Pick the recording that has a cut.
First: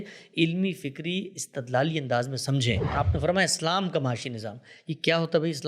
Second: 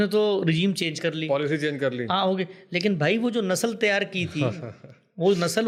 first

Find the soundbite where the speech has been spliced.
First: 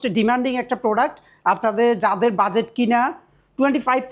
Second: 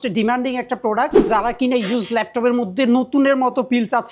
second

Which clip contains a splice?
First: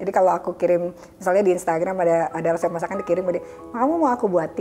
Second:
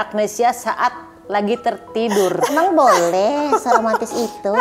second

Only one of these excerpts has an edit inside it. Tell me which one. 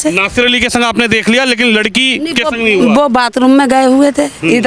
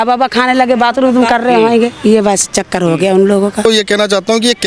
second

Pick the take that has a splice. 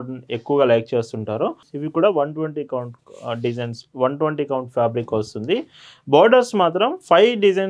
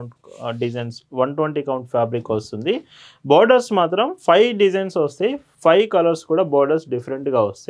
first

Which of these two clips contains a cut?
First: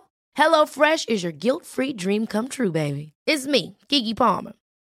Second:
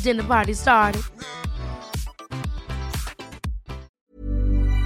second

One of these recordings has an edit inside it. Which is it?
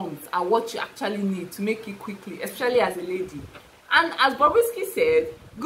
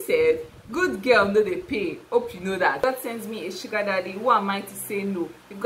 second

